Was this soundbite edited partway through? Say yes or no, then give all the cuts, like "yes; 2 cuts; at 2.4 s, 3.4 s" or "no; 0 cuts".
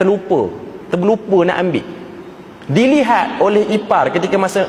no; 0 cuts